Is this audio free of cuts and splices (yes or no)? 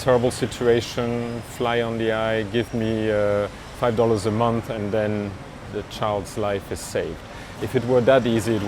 no